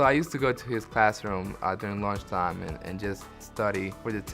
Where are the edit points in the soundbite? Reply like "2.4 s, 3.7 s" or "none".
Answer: 3.4 s

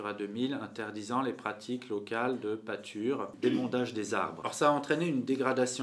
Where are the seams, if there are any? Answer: 3.3 s, 4.4 s

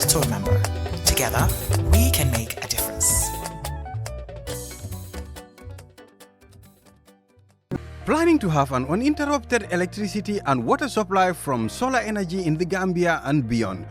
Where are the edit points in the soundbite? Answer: 7.6 s

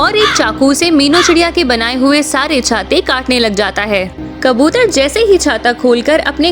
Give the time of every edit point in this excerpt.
4.1 s

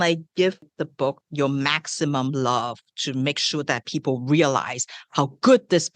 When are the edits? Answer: 1.0 s

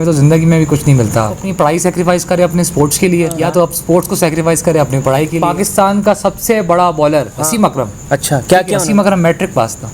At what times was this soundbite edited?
1.4 s, 3.4 s, 5.4 s, 7.4 s, 8.8 s

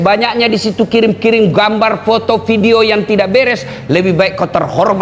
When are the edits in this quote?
none

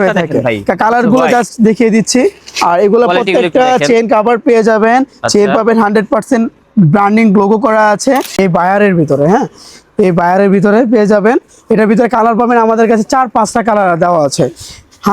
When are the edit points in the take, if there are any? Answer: 8.3 s

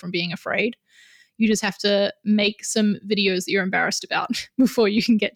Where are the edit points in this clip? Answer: none

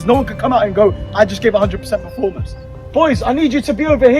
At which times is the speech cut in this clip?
2.6 s

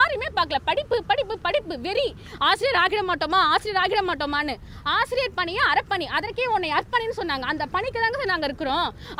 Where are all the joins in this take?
none

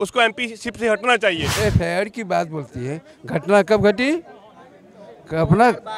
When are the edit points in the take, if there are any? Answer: 1.4 s

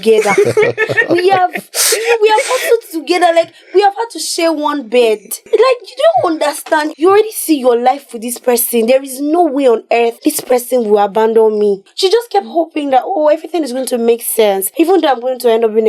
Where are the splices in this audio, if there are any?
5.3 s, 6.9 s, 10.2 s, 11.9 s, 14.7 s

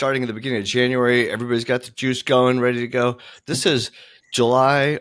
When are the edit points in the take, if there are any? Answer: none

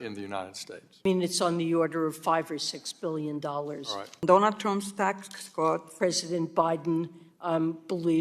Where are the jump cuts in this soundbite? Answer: 1.0 s, 4.2 s, 5.9 s

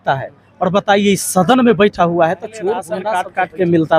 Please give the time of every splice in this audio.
2.9 s

